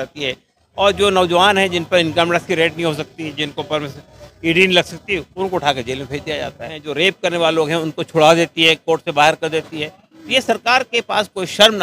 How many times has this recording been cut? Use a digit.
1